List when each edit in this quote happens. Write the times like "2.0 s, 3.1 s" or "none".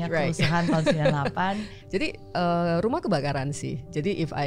1.8 s